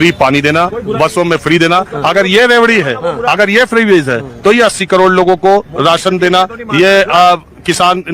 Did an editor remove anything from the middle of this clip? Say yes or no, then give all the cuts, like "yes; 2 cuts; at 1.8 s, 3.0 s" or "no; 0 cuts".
no; 0 cuts